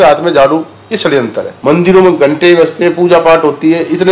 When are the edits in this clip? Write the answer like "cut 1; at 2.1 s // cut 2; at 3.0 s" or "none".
cut 1; at 1.5 s